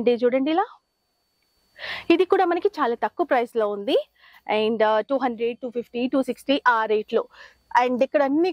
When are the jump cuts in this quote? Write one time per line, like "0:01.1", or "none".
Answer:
none